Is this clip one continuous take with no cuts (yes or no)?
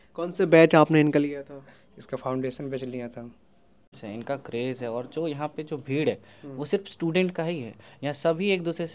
no